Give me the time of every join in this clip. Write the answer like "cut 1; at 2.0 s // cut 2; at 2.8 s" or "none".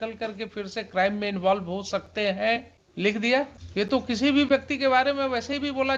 cut 1; at 2.8 s // cut 2; at 3.6 s